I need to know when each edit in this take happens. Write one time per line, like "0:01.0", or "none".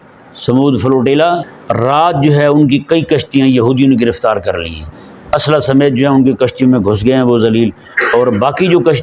0:01.5